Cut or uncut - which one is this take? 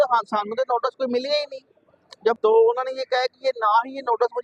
cut